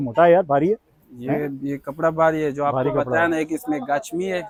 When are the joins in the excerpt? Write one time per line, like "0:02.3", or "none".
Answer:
none